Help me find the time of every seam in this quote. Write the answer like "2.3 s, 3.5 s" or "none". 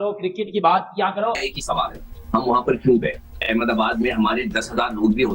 1.4 s, 3.3 s